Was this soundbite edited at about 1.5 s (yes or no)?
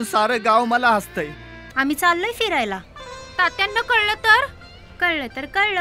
yes